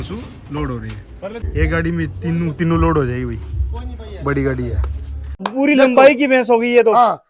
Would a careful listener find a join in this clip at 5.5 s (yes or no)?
yes